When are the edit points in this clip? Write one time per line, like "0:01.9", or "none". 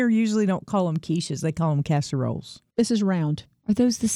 0:02.5